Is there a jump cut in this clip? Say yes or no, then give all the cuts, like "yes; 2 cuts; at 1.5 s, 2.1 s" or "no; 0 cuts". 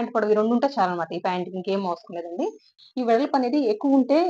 yes; 1 cut; at 2.8 s